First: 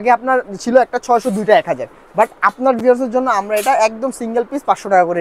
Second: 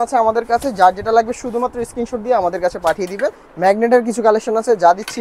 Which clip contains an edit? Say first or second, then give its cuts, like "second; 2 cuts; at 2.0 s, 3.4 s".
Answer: second; 1 cut; at 3.5 s